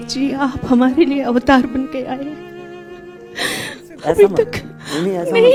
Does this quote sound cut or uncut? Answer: uncut